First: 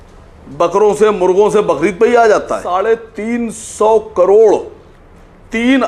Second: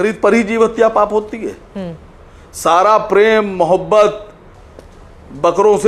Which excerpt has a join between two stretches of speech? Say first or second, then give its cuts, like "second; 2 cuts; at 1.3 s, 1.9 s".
first; 1 cut; at 2.6 s